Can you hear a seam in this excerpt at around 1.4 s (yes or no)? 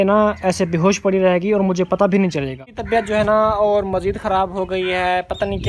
no